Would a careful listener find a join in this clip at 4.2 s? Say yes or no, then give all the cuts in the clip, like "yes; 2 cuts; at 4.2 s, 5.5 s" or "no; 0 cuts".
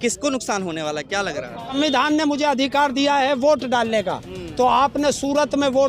no; 1 cut; at 1.7 s